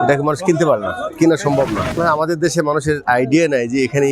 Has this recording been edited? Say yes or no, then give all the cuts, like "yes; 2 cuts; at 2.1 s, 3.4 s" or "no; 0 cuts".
yes; 1 cut; at 2.0 s